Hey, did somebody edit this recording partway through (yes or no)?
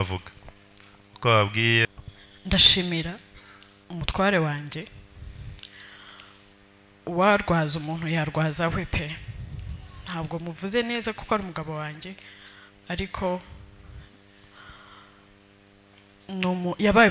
yes